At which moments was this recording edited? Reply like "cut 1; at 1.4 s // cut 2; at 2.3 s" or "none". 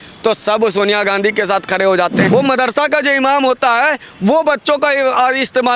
cut 1; at 2.2 s

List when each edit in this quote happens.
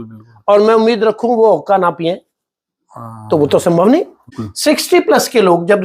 cut 1; at 4.3 s

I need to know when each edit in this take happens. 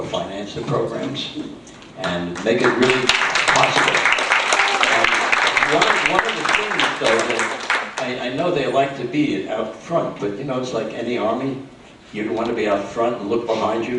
cut 1; at 6.7 s

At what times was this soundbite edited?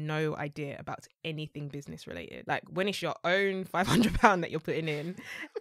cut 1; at 2.3 s

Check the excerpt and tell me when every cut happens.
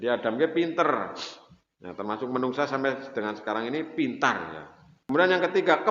cut 1; at 4.9 s

